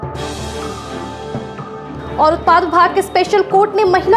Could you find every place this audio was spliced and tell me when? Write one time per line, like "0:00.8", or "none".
none